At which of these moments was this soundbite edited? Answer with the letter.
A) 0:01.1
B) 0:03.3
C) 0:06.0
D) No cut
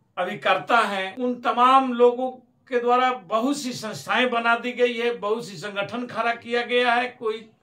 A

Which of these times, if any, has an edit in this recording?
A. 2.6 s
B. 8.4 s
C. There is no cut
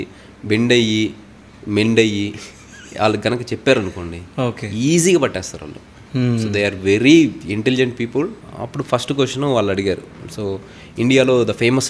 B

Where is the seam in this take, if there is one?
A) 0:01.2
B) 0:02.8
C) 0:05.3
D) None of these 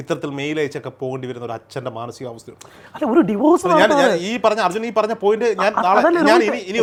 D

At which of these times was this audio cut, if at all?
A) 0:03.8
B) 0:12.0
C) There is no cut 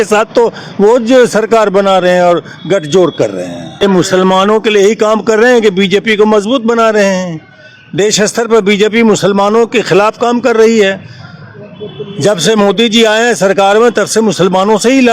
A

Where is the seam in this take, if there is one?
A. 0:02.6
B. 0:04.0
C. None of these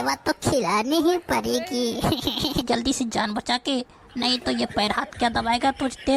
A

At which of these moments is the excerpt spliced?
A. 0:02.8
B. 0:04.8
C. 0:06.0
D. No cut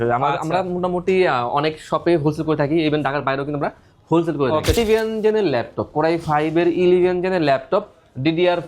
B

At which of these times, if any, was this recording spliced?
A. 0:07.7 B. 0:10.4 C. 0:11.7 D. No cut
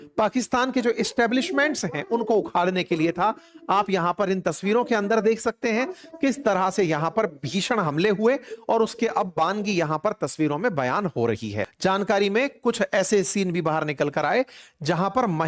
C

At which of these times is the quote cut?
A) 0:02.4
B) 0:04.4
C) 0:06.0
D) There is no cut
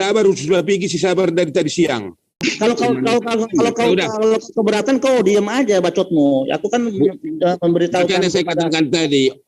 A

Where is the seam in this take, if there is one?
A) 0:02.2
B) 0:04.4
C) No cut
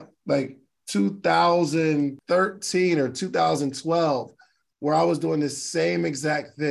A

